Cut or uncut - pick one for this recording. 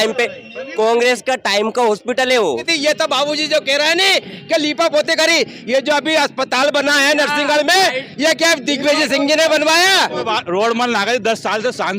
cut